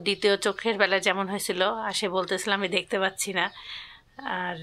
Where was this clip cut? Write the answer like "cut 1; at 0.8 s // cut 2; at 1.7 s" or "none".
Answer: none